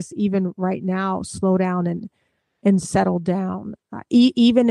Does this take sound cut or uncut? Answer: uncut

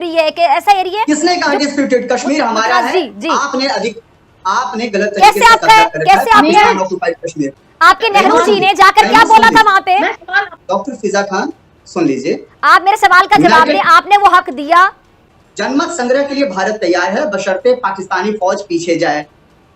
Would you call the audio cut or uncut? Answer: uncut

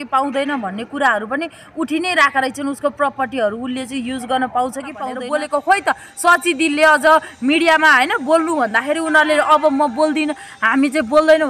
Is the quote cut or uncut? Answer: cut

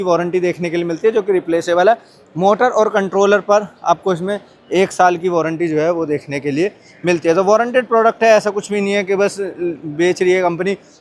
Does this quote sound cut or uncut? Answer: uncut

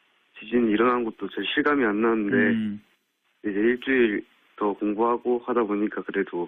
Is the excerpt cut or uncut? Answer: uncut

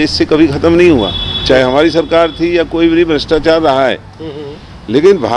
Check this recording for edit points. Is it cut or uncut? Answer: uncut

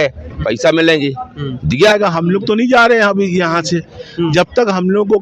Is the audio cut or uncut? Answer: cut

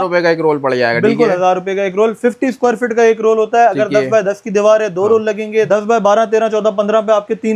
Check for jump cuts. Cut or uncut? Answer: cut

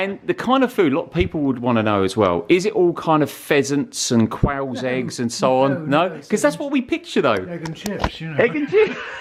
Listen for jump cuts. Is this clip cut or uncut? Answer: uncut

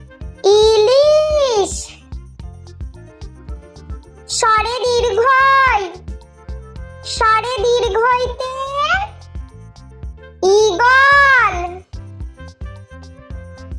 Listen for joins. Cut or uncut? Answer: uncut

